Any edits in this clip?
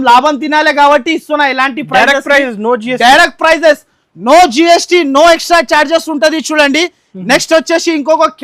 no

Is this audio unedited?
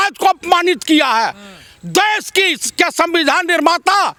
yes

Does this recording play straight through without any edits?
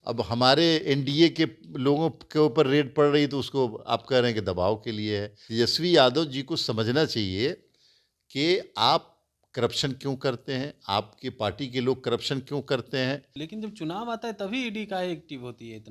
no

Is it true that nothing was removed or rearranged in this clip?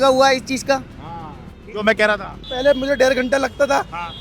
no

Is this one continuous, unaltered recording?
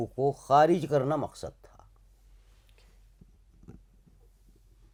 yes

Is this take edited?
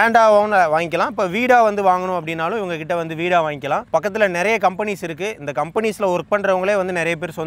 no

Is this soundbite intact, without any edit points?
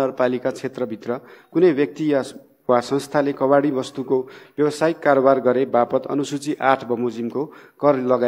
yes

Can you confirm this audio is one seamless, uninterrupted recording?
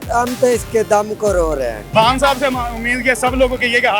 no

